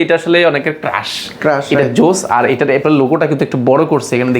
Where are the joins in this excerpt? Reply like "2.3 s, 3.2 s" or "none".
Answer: none